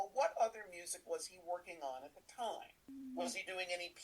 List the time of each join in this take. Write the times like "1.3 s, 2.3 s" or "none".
2.9 s

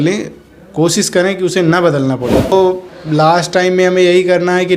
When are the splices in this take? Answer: 2.5 s

